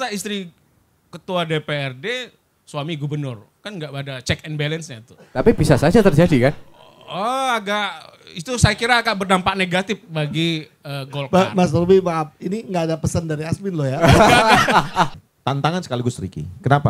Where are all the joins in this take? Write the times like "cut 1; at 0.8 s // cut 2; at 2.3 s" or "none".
cut 1; at 15.1 s